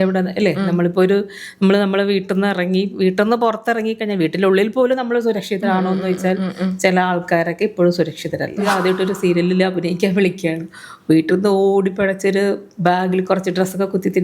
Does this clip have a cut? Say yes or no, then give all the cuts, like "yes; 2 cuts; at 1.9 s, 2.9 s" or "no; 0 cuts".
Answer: yes; 1 cut; at 8.6 s